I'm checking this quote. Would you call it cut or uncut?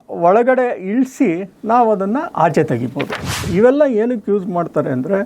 cut